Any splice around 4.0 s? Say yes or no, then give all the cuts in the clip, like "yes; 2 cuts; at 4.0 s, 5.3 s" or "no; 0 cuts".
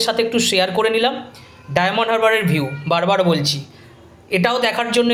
no; 0 cuts